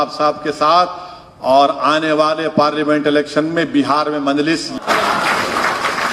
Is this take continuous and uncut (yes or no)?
no